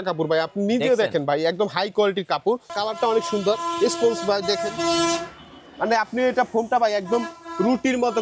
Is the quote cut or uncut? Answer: cut